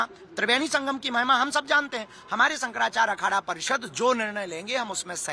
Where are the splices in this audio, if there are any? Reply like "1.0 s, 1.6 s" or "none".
none